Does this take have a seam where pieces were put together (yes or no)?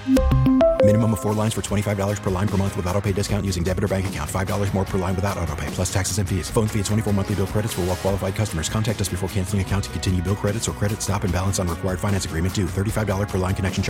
no